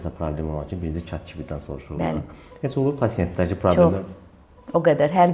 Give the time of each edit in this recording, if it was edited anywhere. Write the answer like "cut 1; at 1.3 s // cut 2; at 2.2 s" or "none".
none